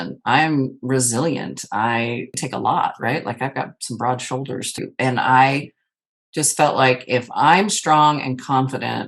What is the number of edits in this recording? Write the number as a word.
two